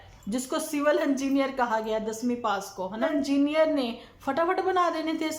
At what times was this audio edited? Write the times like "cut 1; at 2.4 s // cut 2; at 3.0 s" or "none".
cut 1; at 3.1 s